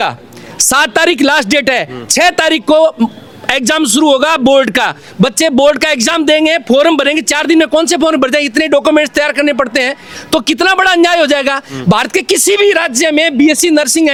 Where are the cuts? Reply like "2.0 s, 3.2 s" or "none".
none